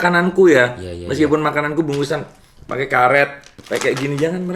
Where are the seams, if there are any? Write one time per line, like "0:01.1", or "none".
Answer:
none